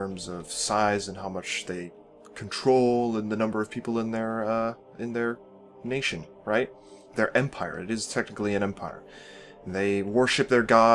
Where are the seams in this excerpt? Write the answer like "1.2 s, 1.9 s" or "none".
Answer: 3.3 s